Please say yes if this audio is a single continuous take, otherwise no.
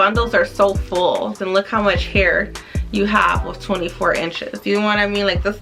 no